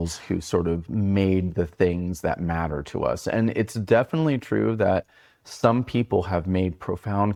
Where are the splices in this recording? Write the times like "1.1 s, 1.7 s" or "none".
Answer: none